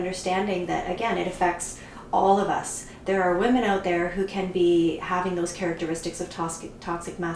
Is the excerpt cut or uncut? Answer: uncut